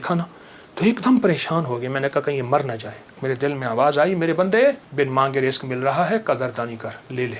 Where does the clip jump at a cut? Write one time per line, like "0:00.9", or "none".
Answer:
0:03.2
0:04.8